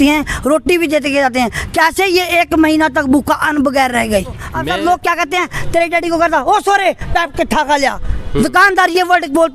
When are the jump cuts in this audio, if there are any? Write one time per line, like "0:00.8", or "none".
0:04.5